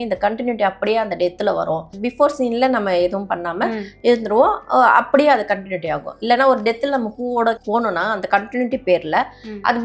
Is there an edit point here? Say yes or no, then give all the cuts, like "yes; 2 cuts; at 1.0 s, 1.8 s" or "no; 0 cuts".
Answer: yes; 2 cuts; at 2.0 s, 7.6 s